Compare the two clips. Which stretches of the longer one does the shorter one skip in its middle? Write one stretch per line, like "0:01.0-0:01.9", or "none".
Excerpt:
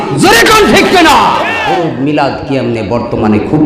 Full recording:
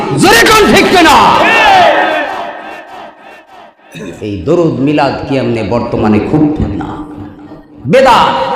0:01.6-0:04.4